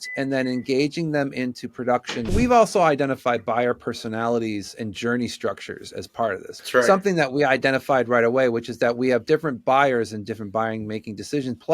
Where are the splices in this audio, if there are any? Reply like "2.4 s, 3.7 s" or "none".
2.3 s, 6.5 s